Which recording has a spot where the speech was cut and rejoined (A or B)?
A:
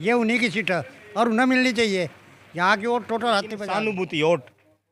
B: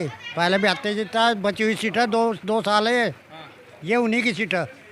A